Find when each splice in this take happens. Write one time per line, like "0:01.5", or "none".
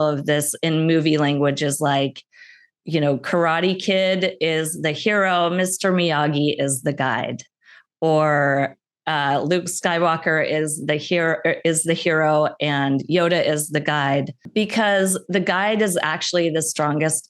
0:14.4